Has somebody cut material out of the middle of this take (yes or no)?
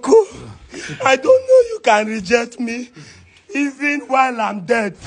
no